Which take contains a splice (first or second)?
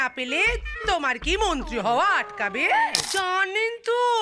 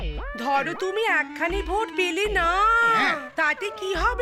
first